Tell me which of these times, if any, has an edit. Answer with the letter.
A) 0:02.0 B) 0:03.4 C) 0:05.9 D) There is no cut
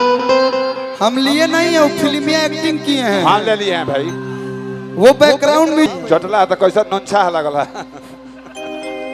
C